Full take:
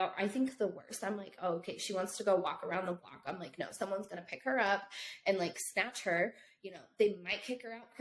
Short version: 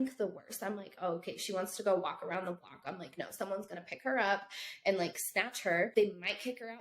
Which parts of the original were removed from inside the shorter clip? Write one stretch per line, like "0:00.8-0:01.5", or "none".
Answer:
0:06.3-0:06.9